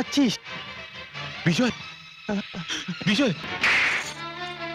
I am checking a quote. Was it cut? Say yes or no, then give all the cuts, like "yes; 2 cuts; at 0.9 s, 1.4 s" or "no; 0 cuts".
yes; 1 cut; at 3.4 s